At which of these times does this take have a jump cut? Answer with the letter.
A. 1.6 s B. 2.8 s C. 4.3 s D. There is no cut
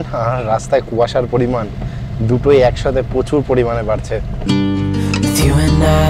C